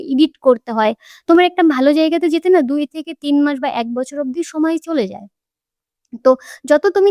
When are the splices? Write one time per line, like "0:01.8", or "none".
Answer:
none